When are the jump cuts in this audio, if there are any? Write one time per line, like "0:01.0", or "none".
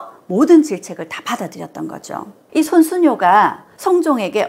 0:02.4